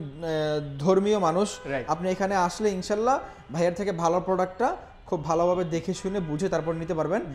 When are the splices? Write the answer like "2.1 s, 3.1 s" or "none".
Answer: none